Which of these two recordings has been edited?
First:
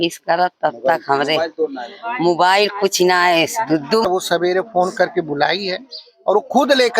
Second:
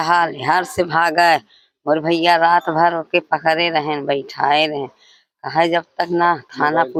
first; 1 cut; at 4.1 s

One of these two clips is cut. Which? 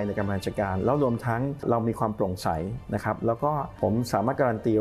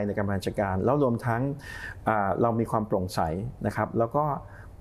first; 2 cuts; at 1.6 s, 3.7 s

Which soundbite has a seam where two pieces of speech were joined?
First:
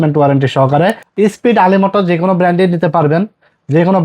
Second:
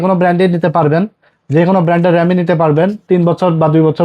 first; 1 cut; at 1.0 s

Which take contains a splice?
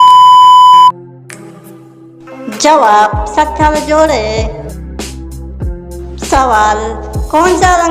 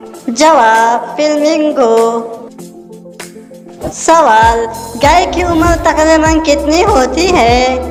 first; 1 cut; at 0.9 s

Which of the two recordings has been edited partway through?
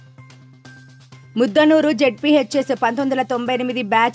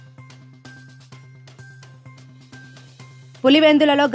second; 1 cut; at 1.2 s

